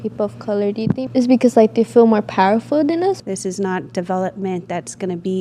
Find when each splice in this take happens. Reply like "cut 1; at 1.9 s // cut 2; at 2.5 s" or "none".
cut 1; at 1.1 s // cut 2; at 3.2 s